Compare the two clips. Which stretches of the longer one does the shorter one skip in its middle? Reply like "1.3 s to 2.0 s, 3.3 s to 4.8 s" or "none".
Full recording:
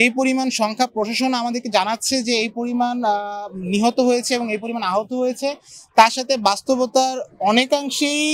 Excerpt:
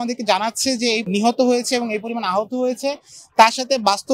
2.5 s to 3.6 s